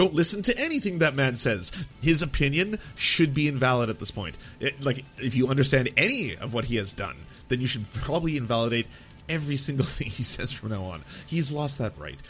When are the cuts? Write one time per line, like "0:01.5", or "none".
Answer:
0:01.8